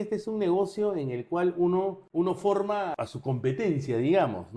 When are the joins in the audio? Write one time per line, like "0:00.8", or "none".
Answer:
0:02.0